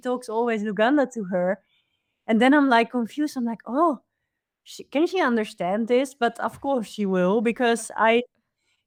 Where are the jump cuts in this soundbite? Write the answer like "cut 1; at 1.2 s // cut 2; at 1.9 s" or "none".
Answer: none